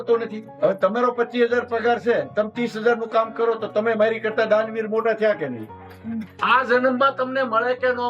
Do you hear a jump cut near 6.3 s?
yes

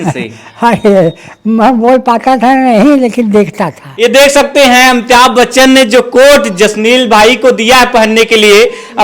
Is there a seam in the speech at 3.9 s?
yes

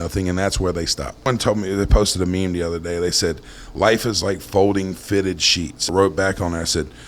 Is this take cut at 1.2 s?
yes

